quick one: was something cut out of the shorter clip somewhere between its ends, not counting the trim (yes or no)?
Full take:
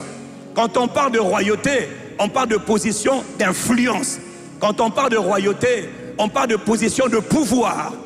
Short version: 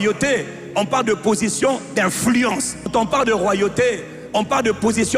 yes